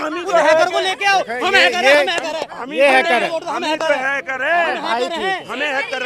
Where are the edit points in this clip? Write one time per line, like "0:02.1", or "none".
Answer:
none